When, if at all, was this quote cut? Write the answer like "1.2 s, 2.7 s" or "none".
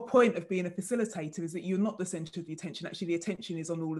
none

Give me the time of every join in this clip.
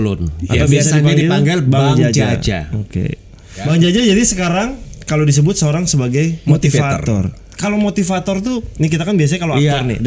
3.6 s, 7.5 s

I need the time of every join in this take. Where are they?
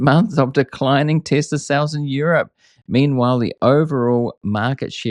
none

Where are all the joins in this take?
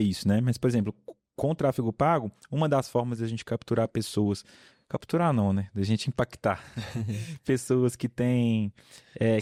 none

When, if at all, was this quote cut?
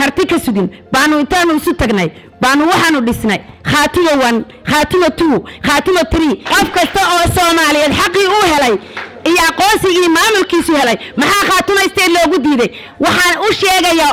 6.5 s

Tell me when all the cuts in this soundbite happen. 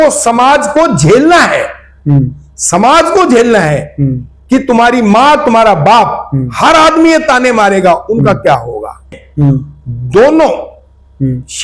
9.1 s

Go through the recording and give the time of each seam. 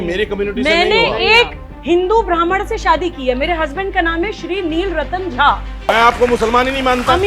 5.9 s

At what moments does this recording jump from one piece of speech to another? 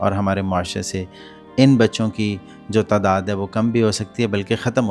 none

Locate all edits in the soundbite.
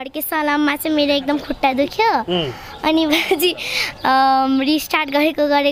none

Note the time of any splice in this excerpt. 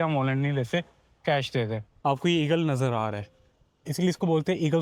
1.8 s

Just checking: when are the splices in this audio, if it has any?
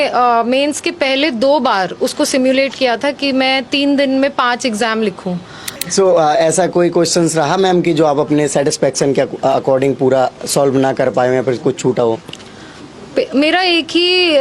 5.7 s

